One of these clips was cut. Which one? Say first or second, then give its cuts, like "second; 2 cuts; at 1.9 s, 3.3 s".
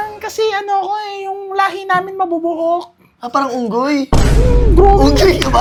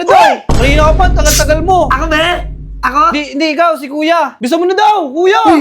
second; 1 cut; at 4.3 s